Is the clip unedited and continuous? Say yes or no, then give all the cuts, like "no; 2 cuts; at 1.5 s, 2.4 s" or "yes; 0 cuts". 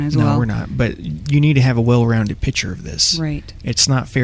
yes; 0 cuts